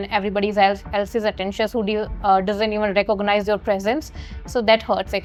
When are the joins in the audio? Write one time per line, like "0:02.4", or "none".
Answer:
none